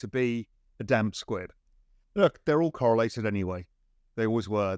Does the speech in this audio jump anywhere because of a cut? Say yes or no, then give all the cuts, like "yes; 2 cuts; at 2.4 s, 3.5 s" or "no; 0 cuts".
no; 0 cuts